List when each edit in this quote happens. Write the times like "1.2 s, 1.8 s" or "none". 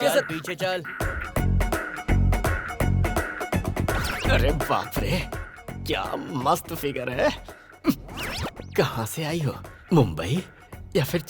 0.9 s